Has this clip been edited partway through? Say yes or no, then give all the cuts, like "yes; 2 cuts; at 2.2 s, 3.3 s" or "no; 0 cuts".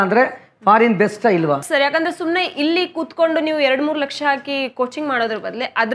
yes; 1 cut; at 1.6 s